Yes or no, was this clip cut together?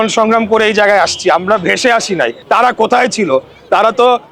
yes